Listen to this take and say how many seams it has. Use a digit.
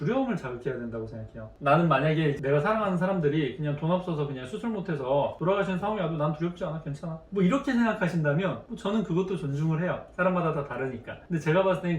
2